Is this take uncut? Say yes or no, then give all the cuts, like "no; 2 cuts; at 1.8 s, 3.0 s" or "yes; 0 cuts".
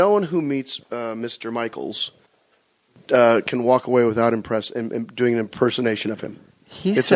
no; 1 cut; at 5.1 s